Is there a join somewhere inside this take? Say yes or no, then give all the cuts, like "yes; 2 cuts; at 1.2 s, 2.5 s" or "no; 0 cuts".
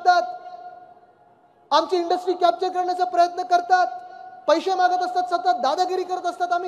no; 0 cuts